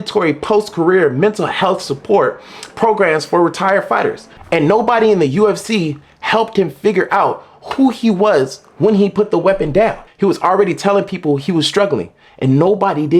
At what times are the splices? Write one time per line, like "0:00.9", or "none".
0:04.3
0:10.0